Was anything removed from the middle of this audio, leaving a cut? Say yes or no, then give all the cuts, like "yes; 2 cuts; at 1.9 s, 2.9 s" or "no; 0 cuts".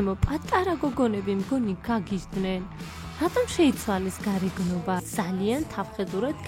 yes; 1 cut; at 5.1 s